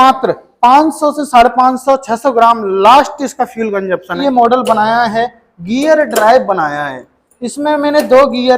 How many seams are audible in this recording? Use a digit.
1